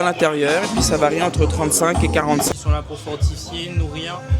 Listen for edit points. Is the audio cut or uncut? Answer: cut